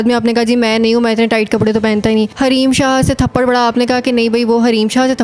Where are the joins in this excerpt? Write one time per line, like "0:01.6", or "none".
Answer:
0:02.3